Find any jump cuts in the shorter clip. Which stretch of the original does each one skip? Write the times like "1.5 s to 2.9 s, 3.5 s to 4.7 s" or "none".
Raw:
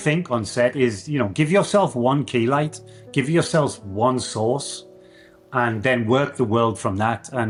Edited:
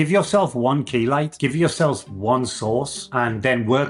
2.7 s to 3.1 s, 4.7 s to 5.4 s